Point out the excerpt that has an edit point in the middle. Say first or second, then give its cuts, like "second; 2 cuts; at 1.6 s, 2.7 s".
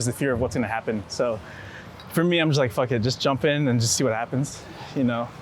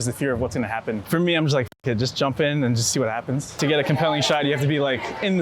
second; 2 cuts; at 1.0 s, 3.5 s